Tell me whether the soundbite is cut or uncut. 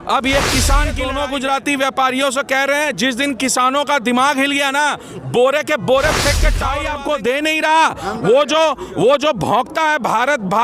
cut